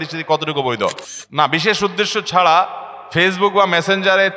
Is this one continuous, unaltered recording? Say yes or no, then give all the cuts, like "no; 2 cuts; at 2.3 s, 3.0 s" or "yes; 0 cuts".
no; 1 cut; at 1.1 s